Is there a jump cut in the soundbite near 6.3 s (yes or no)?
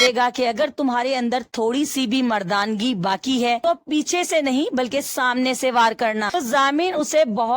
yes